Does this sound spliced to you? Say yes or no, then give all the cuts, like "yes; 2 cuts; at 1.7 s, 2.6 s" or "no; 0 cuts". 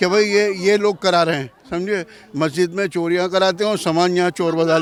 no; 0 cuts